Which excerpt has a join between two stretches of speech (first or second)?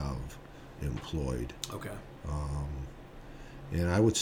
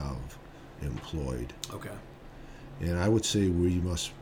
second